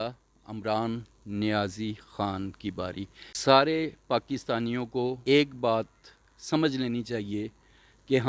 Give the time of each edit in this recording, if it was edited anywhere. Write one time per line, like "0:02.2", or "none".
0:03.2
0:05.2

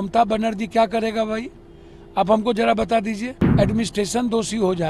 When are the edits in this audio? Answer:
0:03.4

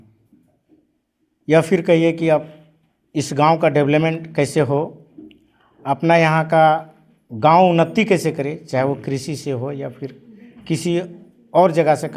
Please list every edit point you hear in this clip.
none

